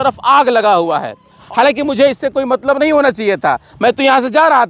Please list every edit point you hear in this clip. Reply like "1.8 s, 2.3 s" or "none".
1.4 s

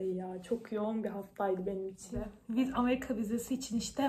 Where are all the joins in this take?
2.4 s

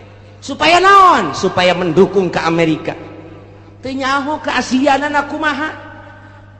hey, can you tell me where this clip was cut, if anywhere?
none

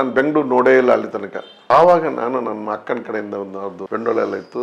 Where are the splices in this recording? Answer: 1.6 s

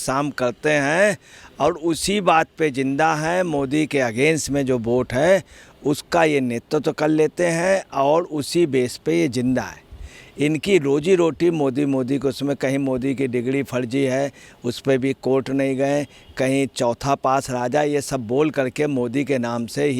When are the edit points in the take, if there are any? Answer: none

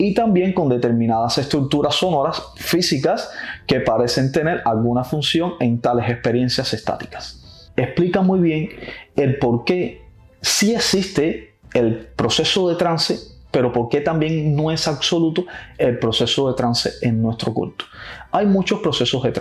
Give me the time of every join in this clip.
none

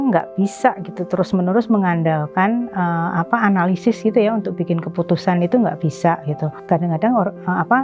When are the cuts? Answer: 6.5 s

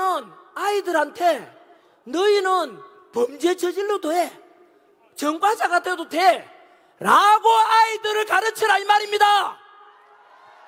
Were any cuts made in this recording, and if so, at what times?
none

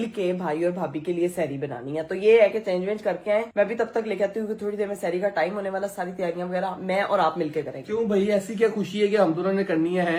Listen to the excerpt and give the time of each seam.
none

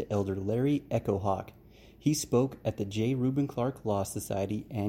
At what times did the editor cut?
none

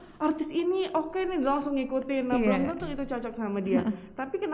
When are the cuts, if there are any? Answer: none

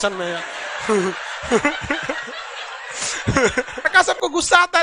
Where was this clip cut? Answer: 3.9 s

